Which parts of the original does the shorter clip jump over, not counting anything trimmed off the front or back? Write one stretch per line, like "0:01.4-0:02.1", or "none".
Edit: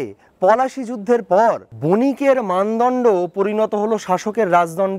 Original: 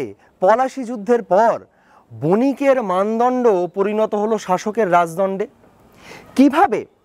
0:01.7-0:02.1